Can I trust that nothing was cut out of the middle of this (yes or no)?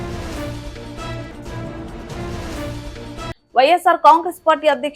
no